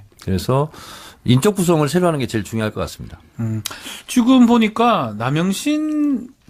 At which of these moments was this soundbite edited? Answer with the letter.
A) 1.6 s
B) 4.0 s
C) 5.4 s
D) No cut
D